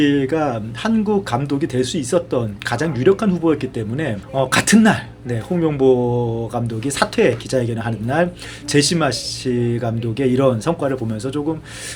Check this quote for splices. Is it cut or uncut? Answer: uncut